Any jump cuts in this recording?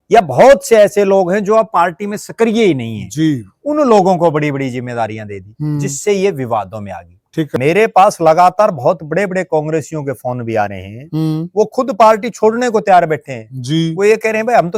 yes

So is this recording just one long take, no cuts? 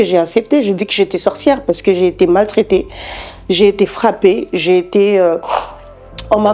yes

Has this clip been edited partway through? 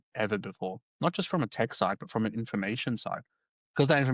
yes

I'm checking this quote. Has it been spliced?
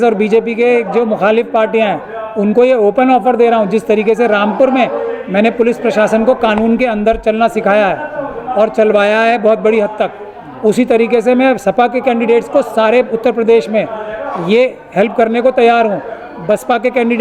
no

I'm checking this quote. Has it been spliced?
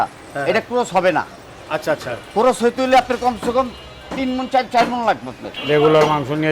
yes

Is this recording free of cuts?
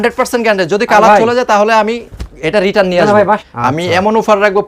no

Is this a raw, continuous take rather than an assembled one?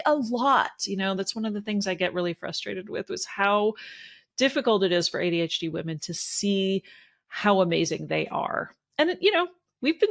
yes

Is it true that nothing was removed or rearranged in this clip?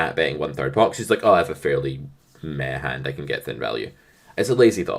yes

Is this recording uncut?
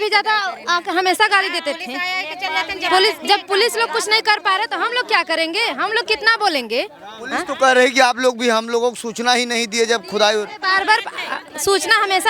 yes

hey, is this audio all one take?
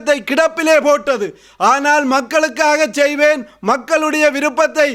yes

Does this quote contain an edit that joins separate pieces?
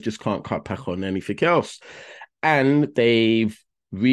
no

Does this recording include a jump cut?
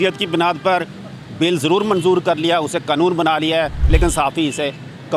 no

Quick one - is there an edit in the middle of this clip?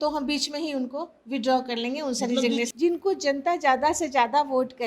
yes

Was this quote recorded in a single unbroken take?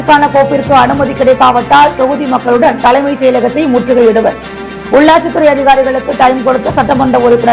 yes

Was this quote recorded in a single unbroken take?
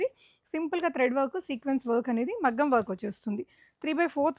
yes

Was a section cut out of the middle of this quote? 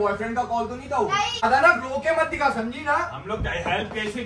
yes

